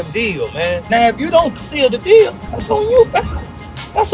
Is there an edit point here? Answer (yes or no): yes